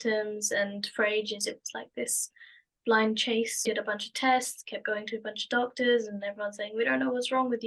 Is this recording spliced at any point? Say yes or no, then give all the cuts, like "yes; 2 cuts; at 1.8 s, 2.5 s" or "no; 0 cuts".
yes; 1 cut; at 3.6 s